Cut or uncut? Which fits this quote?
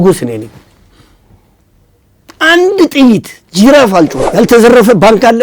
cut